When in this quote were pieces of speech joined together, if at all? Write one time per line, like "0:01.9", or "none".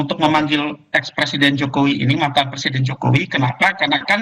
0:03.3